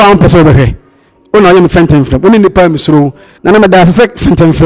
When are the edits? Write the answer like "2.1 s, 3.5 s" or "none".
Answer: 3.2 s